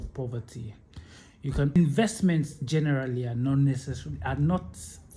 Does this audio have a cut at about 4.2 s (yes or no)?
no